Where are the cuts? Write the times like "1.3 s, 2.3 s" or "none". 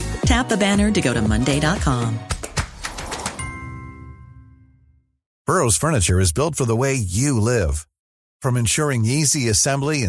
5.3 s